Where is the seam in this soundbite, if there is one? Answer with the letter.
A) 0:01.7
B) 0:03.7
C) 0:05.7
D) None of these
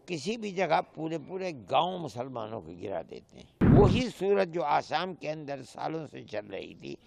B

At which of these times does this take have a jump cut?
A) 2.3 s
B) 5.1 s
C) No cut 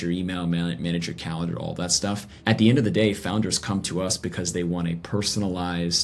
A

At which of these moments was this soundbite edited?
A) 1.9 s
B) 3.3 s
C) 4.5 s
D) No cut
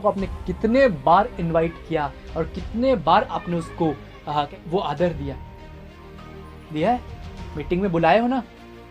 C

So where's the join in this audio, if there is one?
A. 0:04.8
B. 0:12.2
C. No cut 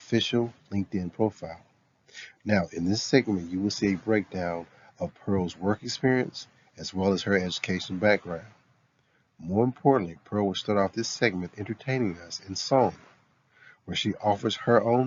C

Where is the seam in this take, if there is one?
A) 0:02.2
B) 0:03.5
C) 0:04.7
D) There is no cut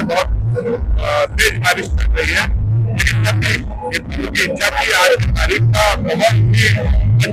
D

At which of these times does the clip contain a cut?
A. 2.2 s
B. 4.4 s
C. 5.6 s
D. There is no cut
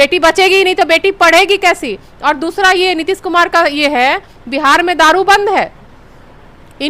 D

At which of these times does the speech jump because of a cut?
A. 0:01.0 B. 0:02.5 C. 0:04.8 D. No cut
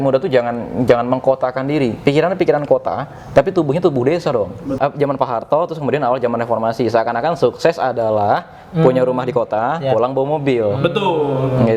C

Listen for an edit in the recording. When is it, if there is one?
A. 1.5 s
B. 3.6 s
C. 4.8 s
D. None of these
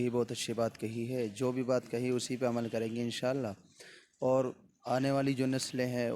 D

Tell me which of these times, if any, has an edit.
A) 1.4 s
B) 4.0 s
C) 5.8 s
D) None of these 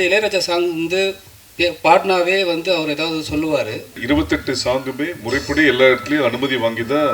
B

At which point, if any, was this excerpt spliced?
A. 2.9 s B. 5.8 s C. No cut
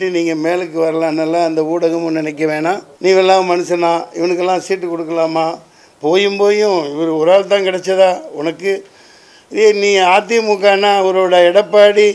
A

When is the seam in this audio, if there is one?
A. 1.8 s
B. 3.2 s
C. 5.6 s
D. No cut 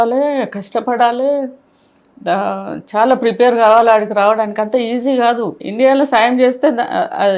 C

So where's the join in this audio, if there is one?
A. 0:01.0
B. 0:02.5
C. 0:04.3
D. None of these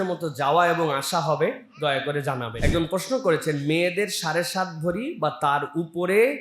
B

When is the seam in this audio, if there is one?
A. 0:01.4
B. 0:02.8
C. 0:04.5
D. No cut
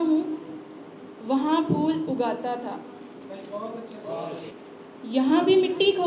C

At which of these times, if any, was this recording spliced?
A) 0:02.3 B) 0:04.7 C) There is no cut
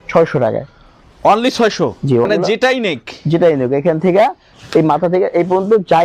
A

